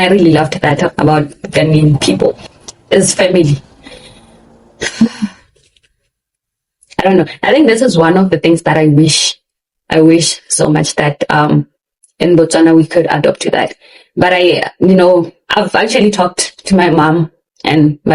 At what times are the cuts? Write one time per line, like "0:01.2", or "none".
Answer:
0:00.9

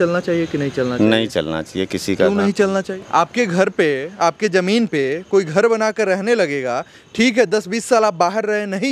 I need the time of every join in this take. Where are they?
0:03.0

